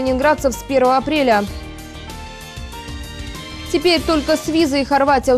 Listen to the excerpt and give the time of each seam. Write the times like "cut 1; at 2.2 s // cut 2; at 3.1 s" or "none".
none